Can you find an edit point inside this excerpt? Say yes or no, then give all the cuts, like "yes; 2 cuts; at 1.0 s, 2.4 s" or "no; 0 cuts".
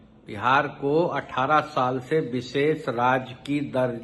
no; 0 cuts